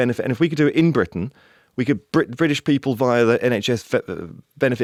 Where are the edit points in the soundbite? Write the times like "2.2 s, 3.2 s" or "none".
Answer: none

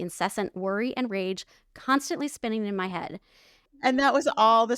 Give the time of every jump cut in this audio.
3.8 s

